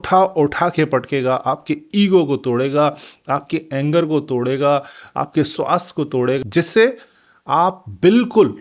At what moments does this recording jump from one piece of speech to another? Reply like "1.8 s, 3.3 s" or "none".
6.4 s